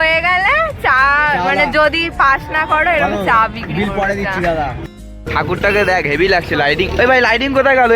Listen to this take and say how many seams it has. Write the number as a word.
one